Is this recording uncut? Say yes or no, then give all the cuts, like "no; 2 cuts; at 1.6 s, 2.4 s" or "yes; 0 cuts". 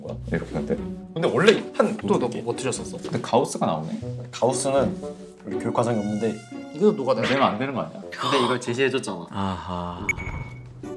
yes; 0 cuts